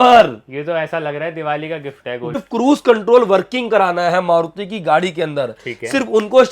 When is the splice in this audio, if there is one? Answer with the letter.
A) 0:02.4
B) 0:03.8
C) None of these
A